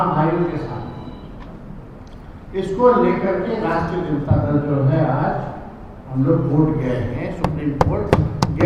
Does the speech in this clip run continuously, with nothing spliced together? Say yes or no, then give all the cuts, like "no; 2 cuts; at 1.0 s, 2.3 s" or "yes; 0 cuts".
yes; 0 cuts